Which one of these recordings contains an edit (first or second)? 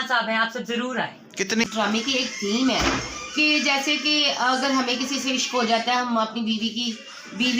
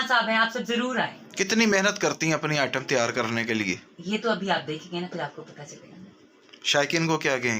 first